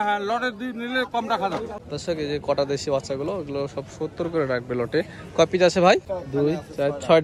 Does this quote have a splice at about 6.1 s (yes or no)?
yes